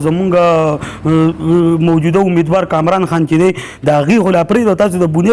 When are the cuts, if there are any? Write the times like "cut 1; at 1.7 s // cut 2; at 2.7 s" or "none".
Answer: none